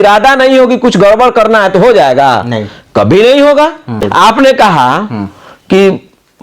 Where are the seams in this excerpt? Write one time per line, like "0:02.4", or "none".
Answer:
0:04.0